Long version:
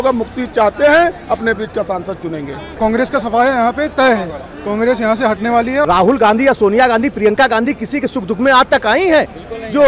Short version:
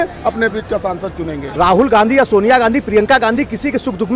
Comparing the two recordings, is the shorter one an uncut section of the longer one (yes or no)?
no